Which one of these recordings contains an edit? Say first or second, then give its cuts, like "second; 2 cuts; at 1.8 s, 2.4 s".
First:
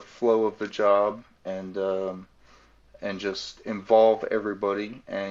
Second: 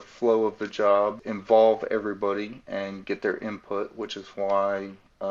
second; 1 cut; at 1.3 s